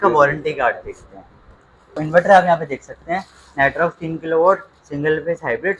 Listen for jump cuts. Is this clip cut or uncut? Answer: cut